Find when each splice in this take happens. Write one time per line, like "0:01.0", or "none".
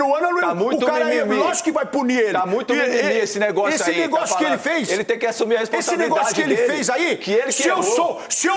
none